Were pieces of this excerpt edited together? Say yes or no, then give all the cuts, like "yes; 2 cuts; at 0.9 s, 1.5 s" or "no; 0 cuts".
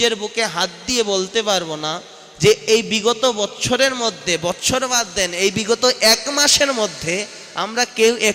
no; 0 cuts